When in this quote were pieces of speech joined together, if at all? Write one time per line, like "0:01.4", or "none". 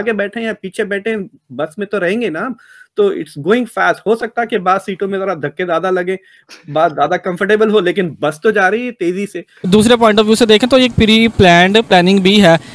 0:09.6